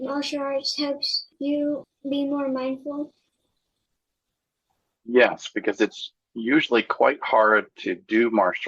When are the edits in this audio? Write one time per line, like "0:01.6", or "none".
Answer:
0:01.7